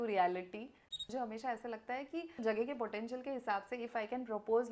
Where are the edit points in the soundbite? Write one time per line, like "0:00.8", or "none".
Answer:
0:00.9
0:02.4